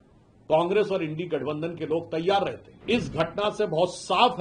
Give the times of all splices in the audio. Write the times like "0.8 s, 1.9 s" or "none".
2.7 s